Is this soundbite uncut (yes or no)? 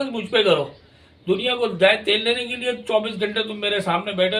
yes